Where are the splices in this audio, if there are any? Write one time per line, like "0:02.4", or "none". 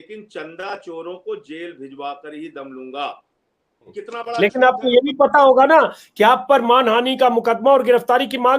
0:03.9

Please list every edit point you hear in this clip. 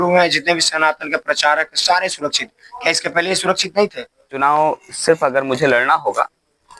0:04.4

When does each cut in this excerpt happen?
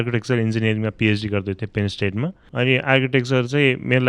0:02.4

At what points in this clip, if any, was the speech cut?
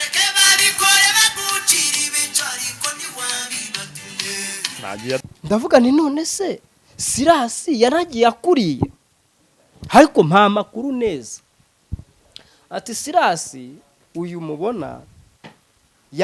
0:05.2

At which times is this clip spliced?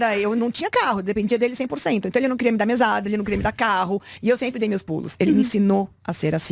none

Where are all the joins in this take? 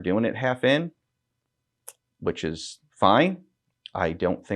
none

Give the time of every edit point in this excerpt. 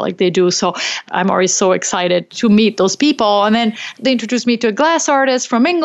0:01.0
0:02.3
0:03.9

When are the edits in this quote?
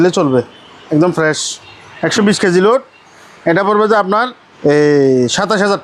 0:04.4

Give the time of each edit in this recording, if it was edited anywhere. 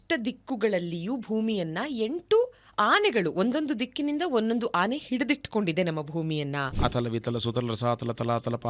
0:06.7

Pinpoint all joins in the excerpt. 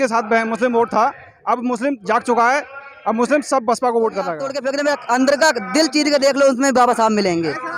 0:04.5

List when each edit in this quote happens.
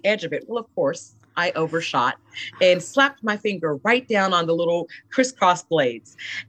none

